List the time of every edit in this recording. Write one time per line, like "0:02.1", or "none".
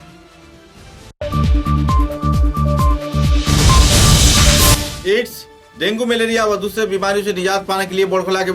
0:04.8